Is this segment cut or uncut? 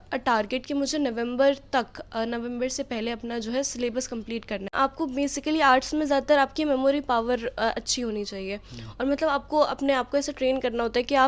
cut